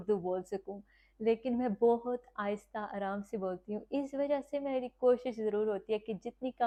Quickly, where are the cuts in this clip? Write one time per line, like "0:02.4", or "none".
none